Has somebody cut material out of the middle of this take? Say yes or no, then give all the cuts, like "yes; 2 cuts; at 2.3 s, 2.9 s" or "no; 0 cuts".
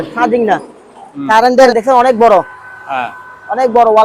yes; 1 cut; at 1.7 s